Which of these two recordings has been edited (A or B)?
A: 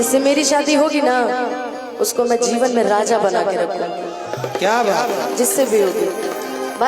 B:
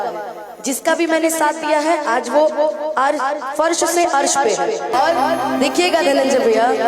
B